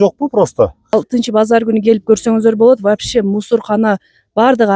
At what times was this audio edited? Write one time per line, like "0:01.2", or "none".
0:00.9